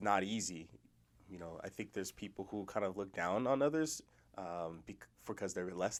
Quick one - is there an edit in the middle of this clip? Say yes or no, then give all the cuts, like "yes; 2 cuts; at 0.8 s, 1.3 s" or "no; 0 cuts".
no; 0 cuts